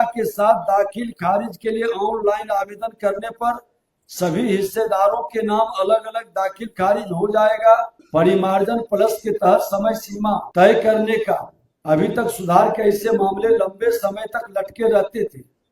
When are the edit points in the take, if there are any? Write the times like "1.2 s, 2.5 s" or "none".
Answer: 8.0 s, 10.5 s